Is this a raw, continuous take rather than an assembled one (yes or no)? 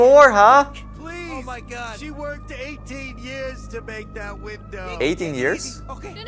yes